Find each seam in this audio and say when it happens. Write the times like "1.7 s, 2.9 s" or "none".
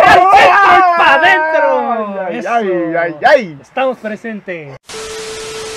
4.8 s